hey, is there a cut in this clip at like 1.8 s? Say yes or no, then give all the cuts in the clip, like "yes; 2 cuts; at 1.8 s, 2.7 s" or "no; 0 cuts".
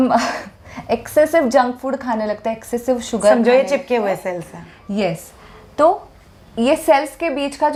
no; 0 cuts